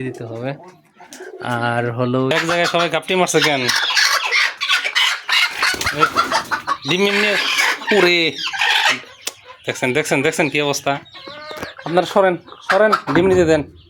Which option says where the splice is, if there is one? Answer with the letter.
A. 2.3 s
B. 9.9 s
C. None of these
A